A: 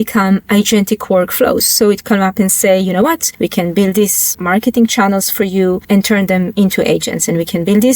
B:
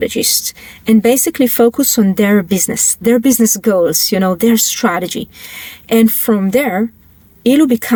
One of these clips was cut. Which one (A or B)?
A